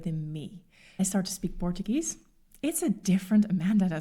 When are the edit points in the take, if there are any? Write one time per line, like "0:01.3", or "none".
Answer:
0:01.0